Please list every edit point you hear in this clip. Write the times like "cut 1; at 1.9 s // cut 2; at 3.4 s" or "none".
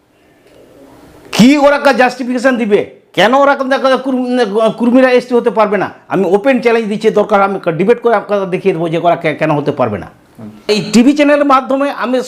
cut 1; at 10.7 s